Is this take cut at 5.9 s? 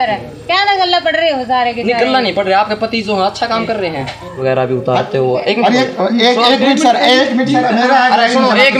no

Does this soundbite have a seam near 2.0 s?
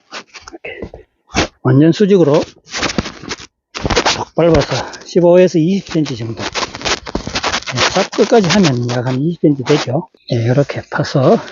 no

